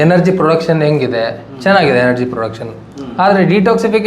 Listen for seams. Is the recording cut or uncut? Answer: uncut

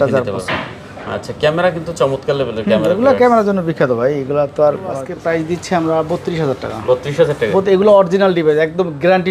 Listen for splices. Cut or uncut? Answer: cut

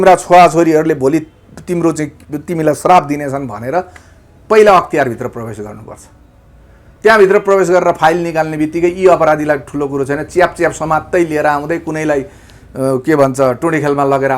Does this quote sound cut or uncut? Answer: uncut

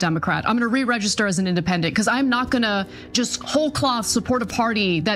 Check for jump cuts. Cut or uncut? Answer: uncut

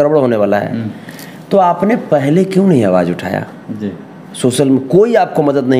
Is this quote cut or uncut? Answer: uncut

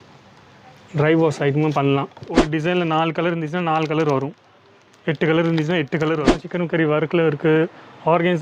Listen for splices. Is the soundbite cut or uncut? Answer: cut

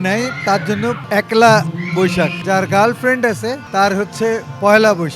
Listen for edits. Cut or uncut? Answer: cut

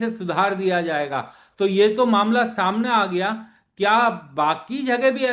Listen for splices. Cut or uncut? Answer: uncut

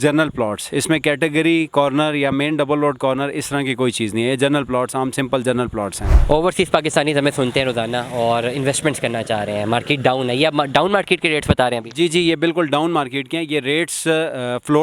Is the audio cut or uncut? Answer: cut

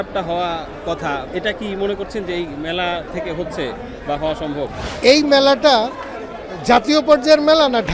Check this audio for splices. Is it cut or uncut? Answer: cut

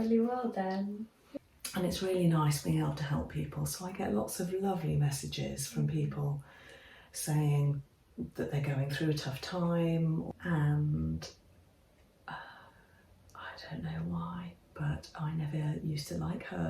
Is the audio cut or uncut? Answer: cut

